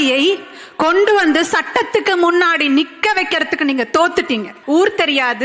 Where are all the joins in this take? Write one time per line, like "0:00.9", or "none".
0:04.5